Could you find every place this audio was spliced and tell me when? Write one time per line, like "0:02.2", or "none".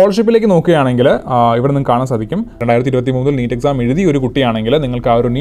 0:02.6